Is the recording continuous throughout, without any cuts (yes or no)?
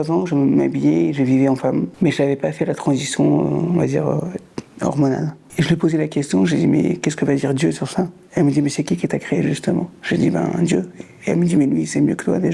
no